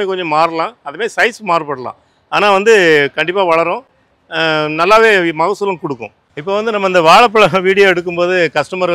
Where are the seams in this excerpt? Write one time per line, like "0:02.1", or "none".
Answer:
none